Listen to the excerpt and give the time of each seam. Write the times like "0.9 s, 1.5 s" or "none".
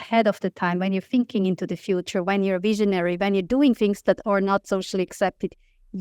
none